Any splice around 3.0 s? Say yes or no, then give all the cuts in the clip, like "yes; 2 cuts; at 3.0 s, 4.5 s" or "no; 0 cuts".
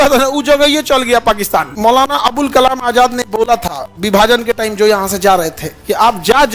no; 1 cut; at 1.7 s